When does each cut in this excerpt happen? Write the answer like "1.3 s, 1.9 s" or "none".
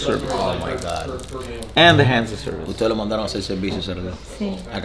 none